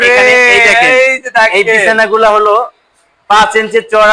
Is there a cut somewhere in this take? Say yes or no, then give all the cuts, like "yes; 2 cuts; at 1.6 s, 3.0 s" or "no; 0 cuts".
no; 0 cuts